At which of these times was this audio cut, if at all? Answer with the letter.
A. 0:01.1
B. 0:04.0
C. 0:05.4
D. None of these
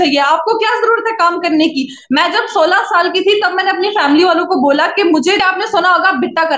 C